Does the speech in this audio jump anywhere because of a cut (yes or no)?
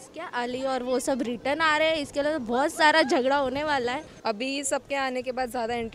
yes